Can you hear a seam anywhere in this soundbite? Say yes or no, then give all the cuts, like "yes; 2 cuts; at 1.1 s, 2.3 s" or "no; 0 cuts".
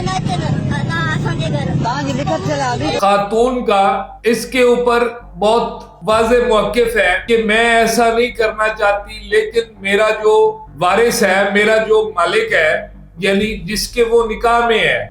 yes; 1 cut; at 3.0 s